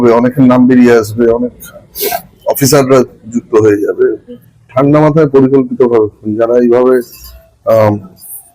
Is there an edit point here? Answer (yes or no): yes